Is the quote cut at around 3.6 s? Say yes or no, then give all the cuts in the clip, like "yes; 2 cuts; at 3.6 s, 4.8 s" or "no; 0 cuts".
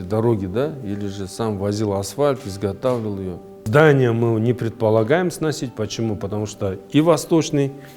yes; 1 cut; at 3.6 s